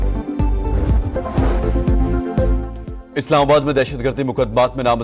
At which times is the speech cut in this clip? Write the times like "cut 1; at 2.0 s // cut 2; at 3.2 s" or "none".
cut 1; at 1.1 s